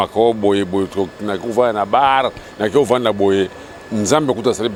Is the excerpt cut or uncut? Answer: uncut